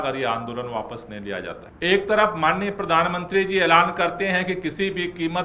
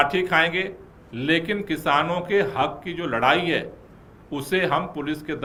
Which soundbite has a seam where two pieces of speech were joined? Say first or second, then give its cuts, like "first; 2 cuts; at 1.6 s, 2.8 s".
first; 1 cut; at 1.7 s